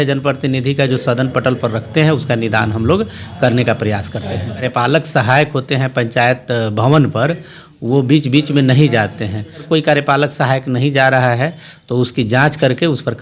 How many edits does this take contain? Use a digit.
2